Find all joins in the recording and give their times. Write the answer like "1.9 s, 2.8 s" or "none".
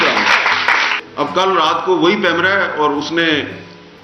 1.0 s

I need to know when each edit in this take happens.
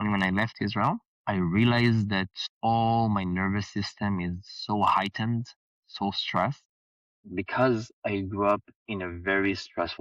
1.1 s, 2.4 s

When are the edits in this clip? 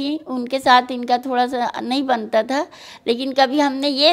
none

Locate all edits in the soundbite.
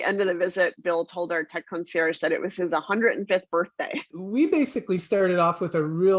4.0 s

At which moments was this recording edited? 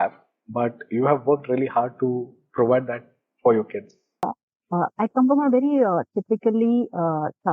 4.2 s

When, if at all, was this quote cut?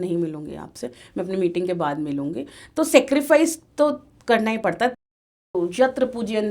5.2 s

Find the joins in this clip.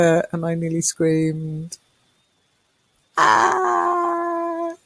none

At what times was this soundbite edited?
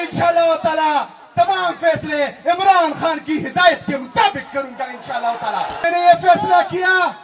5.8 s

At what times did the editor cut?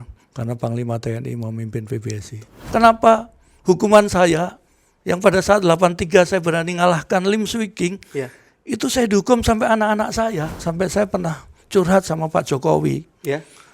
2.5 s, 10.6 s

